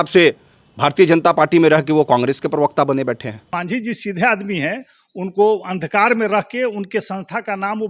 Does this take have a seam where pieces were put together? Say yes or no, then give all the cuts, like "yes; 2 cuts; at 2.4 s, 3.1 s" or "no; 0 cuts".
yes; 1 cut; at 3.4 s